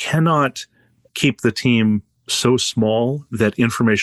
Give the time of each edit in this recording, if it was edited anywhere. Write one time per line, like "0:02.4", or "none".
none